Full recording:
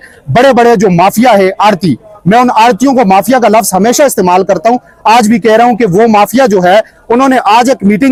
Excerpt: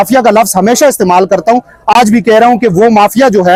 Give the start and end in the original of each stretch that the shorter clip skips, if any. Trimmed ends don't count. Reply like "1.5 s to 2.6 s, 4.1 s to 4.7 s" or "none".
none

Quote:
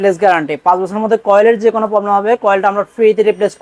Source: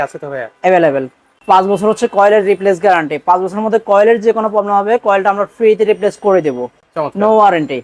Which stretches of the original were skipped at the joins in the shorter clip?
none

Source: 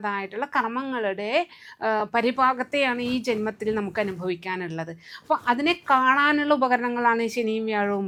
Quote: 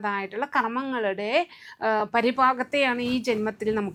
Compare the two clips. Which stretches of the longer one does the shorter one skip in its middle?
none

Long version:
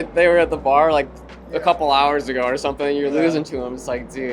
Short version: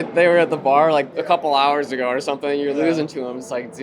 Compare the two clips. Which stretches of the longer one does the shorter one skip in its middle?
1.1 s to 1.5 s

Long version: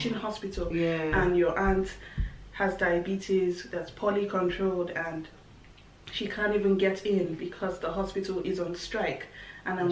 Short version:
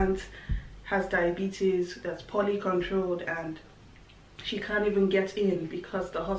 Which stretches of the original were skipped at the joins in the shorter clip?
none

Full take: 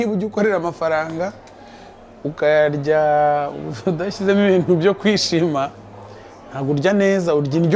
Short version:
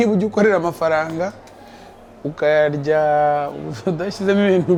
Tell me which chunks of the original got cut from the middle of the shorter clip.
none

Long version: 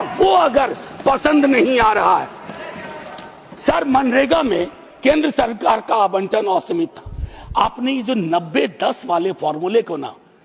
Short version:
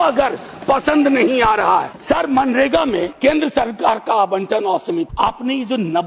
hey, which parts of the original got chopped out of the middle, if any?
2.3 s to 3.5 s, 4.7 s to 4.9 s, 6.9 s to 7.5 s

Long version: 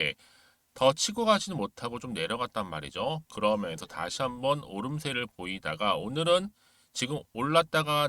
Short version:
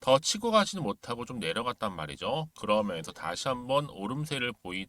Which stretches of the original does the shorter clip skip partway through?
none

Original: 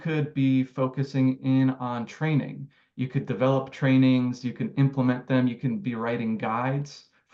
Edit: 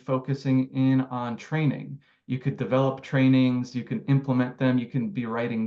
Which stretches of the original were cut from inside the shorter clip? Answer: none

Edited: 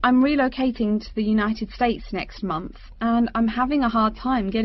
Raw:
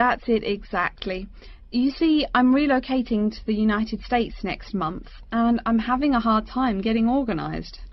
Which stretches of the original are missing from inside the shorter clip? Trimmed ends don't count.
none

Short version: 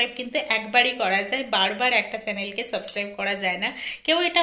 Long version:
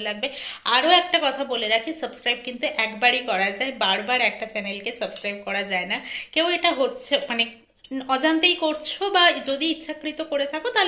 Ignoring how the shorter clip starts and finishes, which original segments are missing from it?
none

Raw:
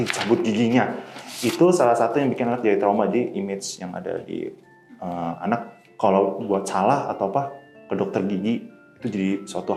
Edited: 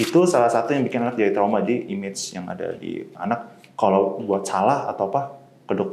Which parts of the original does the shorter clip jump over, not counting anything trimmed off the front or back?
4.6 s to 5.4 s

